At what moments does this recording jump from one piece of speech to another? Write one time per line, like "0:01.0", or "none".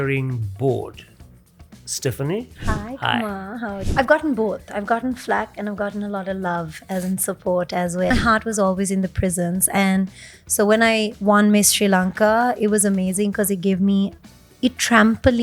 0:03.8
0:08.1